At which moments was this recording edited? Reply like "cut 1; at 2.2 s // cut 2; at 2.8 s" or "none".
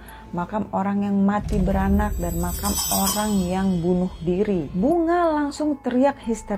cut 1; at 4.7 s